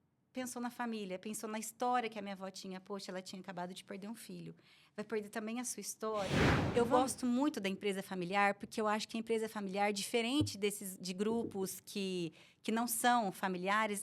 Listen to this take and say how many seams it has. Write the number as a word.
one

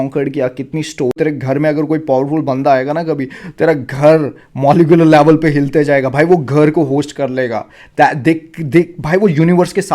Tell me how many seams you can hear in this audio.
one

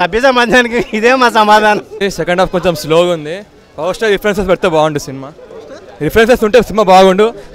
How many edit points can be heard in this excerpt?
one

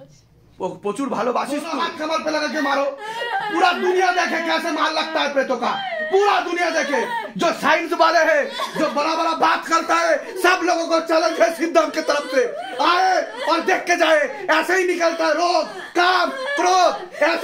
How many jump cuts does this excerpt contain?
one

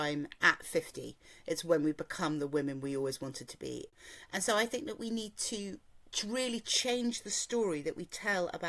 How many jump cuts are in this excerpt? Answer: one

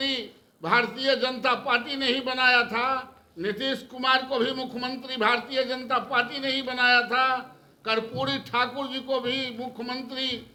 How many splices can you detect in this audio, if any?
zero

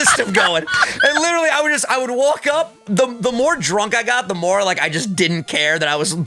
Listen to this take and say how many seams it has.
zero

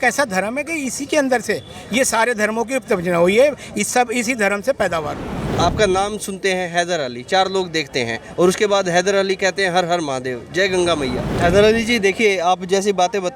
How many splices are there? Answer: two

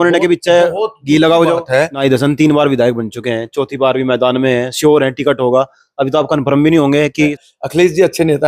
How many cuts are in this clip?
two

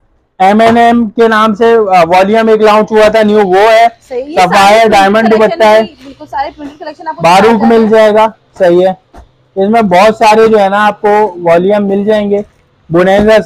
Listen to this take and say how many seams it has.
zero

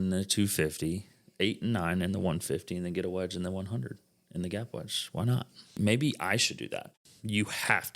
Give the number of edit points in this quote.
two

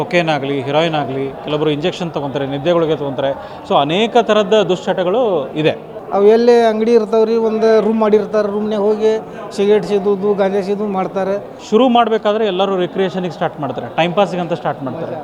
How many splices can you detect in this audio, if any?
two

